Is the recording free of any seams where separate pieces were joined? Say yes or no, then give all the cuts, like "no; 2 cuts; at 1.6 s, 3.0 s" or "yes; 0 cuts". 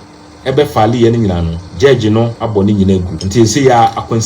no; 3 cuts; at 1.6 s, 2.4 s, 3.2 s